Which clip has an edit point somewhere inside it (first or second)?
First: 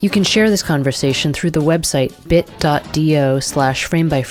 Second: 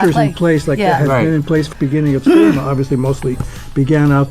second